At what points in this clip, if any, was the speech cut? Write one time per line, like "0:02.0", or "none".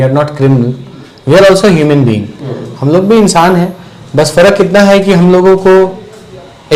none